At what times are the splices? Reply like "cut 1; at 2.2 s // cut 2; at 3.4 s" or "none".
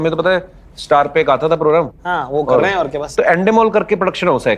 cut 1; at 2.0 s